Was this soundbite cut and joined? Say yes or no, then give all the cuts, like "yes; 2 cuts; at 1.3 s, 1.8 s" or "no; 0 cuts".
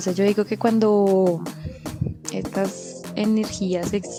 no; 0 cuts